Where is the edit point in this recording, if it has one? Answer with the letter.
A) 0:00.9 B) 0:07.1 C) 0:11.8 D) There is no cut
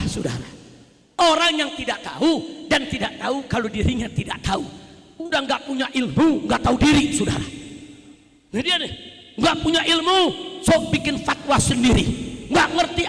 A